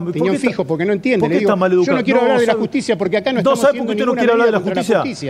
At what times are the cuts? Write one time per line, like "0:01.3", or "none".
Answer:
none